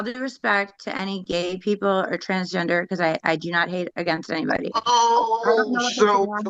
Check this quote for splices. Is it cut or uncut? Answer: uncut